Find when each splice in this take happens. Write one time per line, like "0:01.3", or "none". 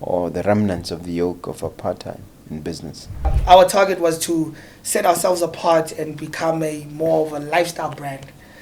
0:03.4